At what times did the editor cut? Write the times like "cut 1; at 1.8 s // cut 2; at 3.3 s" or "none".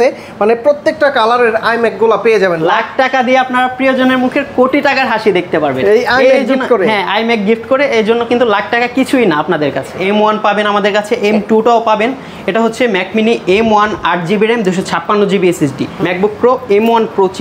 cut 1; at 2.6 s // cut 2; at 10.0 s // cut 3; at 15.9 s